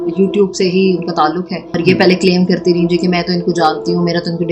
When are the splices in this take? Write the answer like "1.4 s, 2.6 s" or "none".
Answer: 1.8 s